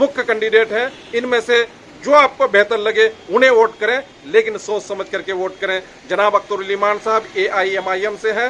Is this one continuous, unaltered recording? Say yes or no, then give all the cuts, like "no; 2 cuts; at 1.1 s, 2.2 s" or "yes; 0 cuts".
yes; 0 cuts